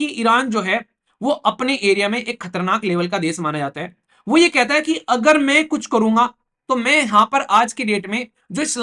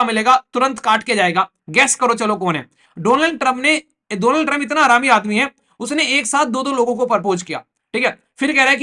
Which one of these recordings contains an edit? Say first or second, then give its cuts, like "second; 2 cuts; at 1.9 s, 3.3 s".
second; 1 cut; at 1.6 s